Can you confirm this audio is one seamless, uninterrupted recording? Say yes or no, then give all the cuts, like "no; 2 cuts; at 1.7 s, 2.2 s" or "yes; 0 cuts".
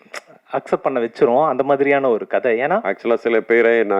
no; 1 cut; at 2.8 s